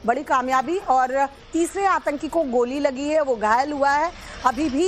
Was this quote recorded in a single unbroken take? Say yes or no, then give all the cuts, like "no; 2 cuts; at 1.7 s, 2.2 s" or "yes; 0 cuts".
yes; 0 cuts